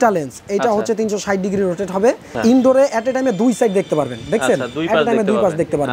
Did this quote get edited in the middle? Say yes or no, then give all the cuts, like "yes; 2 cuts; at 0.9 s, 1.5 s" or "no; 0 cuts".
yes; 1 cut; at 2.3 s